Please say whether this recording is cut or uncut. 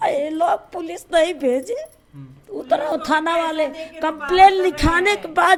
uncut